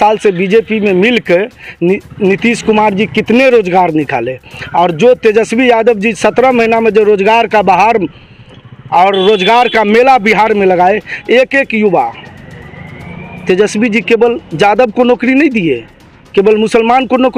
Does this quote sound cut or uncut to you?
uncut